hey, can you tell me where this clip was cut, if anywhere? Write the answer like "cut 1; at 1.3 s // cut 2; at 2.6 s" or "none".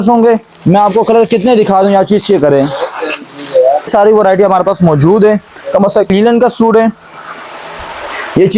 cut 1; at 3.9 s // cut 2; at 6.1 s